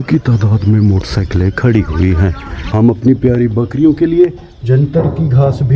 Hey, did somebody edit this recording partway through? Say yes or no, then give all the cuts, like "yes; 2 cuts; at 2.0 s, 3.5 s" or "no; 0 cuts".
yes; 1 cut; at 2.6 s